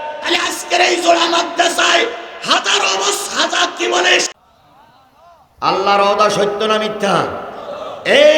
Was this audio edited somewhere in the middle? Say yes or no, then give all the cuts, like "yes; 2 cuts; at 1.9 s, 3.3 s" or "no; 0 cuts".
yes; 1 cut; at 4.3 s